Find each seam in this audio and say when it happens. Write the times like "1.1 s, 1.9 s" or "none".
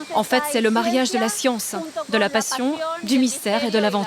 none